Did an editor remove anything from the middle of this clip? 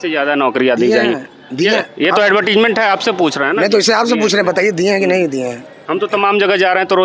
no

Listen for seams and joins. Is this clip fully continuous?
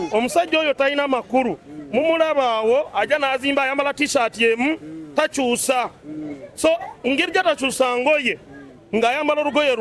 yes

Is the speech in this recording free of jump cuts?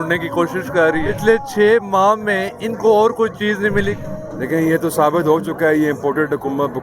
no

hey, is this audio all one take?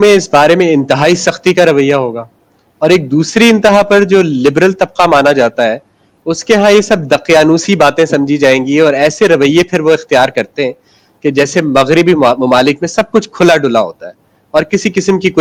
yes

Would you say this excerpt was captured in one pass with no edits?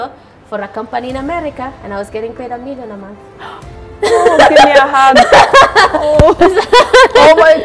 yes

